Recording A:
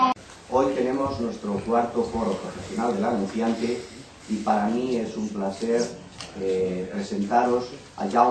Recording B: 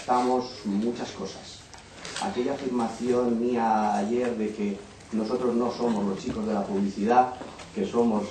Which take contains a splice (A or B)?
B